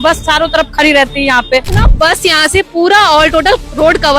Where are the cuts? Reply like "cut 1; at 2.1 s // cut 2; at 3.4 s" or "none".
cut 1; at 1.7 s